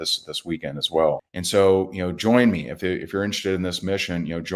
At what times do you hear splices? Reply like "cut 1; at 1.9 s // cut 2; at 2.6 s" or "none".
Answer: cut 1; at 1.3 s